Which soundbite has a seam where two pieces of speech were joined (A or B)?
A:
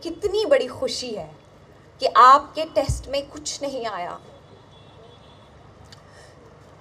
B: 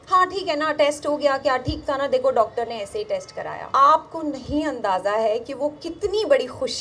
B